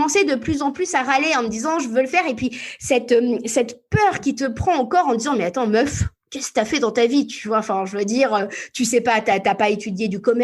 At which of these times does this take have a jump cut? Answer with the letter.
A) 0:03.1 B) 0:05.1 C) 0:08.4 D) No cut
D